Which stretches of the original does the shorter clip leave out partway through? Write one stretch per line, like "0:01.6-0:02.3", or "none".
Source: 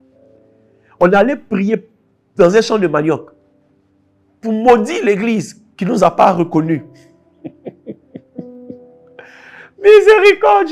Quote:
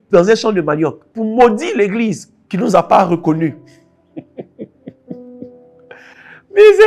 0:03.3-0:04.3